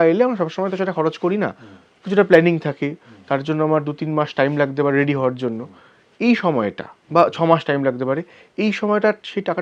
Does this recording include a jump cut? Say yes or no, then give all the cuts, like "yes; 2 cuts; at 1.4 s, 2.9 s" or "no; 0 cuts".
no; 0 cuts